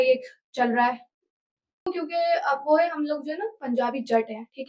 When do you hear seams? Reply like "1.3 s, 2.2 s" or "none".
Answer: 1.9 s

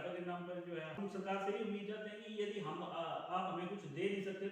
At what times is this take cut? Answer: 1.0 s

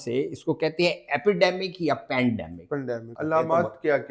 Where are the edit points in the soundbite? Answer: 3.1 s

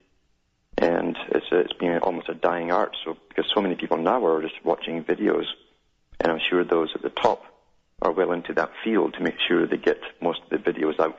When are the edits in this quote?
none

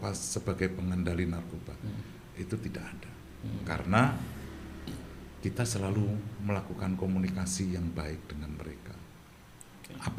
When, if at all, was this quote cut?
none

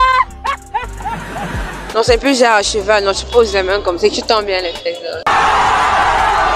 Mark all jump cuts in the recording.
1.8 s

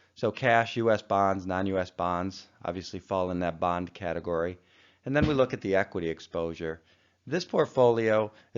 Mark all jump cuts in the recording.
6.6 s

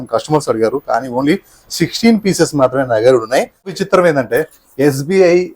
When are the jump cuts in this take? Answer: 3.8 s

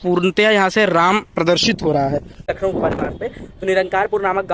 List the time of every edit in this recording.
2.5 s

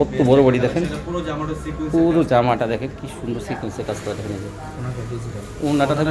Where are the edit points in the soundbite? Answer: none

